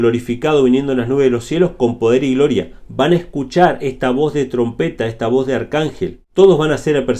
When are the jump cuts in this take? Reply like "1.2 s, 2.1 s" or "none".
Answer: 6.2 s

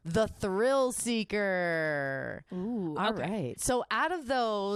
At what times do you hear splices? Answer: none

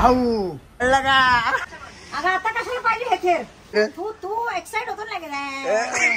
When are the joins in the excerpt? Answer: 0.8 s, 1.8 s, 3.8 s

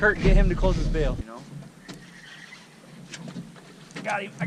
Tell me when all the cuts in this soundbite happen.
1.2 s

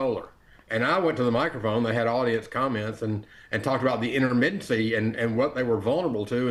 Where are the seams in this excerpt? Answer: none

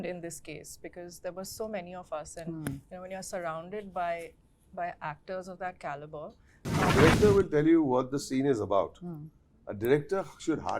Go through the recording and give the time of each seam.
6.9 s

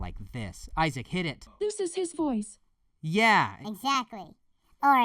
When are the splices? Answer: 1.4 s

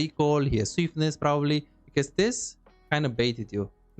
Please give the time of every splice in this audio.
1.8 s

